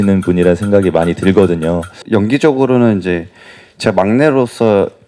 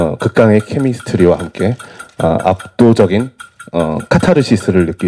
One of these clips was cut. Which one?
first; 1 cut; at 2.0 s

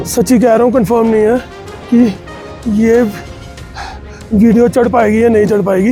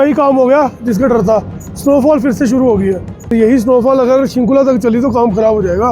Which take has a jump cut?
second; 1 cut; at 3.3 s

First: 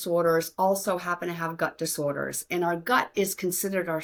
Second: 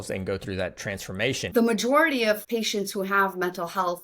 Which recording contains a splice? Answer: second; 2 cuts; at 1.5 s, 2.4 s

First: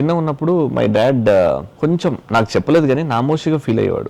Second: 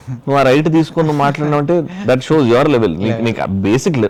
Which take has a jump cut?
first; 1 cut; at 1.7 s

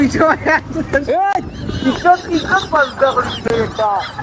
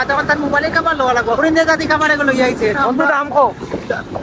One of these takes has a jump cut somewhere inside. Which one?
second; 2 cuts; at 1.4 s, 2.8 s

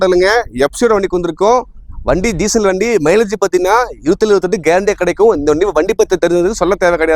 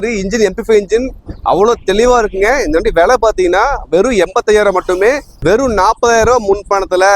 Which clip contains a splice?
second; 1 cut; at 5.3 s

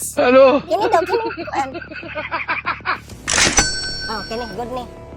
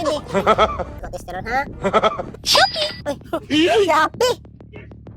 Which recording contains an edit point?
second; 1 cut; at 1.0 s

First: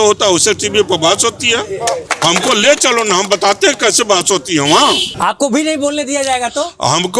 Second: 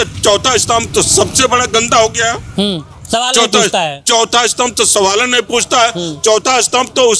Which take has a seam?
first; 2 cuts; at 2.1 s, 5.1 s

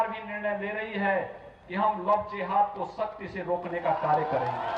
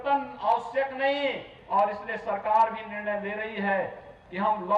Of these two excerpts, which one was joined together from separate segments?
second; 1 cut; at 1.5 s

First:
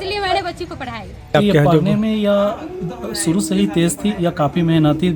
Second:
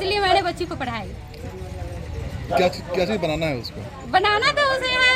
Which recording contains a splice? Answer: first; 1 cut; at 1.3 s

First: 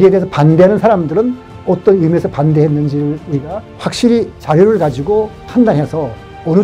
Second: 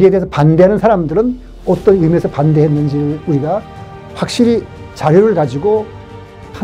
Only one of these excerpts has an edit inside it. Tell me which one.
first; 2 cuts; at 4.1 s, 5.4 s

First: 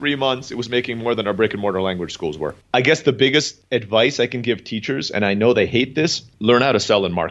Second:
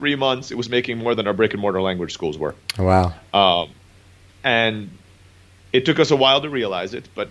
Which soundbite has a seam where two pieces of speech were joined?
first; 3 cuts; at 2.5 s, 3.6 s, 6.3 s

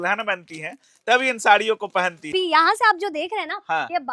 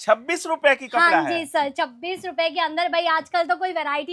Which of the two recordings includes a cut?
first; 1 cut; at 2.3 s

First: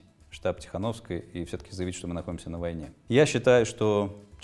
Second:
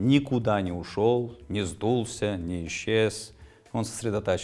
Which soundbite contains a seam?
first; 1 cut; at 2.9 s

